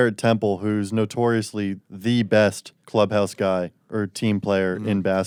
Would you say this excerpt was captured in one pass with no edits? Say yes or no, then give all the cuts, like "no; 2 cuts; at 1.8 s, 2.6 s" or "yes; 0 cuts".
yes; 0 cuts